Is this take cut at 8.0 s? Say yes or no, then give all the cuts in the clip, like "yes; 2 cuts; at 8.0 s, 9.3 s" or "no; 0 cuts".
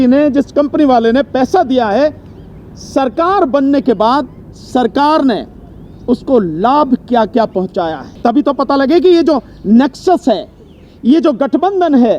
yes; 1 cut; at 8.0 s